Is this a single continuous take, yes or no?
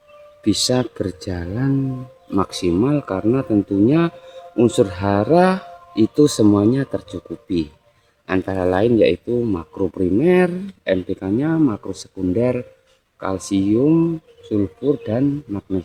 yes